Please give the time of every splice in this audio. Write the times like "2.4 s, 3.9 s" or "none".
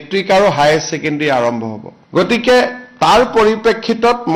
none

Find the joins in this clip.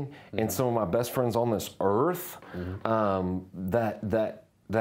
none

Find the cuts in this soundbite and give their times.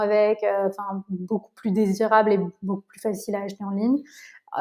none

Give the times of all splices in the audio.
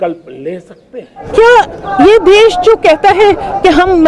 1.1 s

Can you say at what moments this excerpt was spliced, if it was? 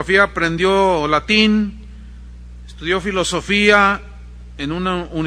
3.9 s

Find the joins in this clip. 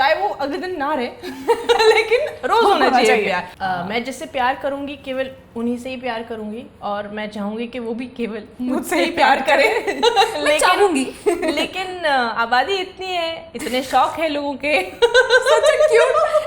3.5 s

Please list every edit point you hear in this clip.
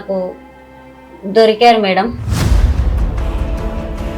2.2 s

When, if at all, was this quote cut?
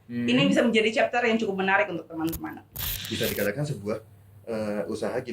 2.6 s

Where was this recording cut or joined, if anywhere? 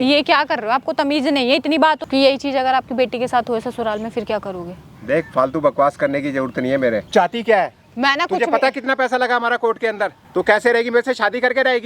2.0 s, 7.1 s, 10.2 s

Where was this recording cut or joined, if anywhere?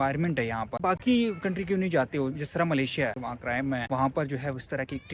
0.8 s, 3.2 s

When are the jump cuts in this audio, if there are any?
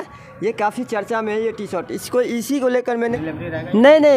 3.2 s

